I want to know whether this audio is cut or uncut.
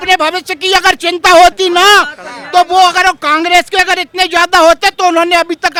uncut